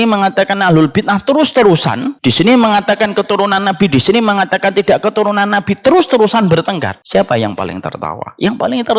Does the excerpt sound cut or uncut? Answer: cut